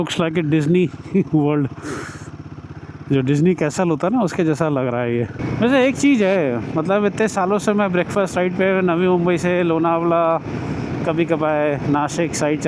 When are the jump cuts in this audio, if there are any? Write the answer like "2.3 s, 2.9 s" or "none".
5.4 s